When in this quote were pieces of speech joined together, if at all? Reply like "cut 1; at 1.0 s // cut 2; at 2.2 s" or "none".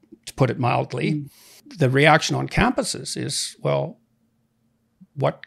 cut 1; at 1.7 s